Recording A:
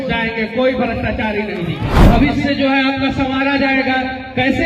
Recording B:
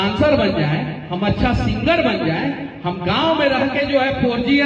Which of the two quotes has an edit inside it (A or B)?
A